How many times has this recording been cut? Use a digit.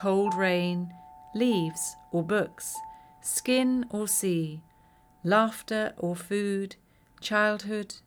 0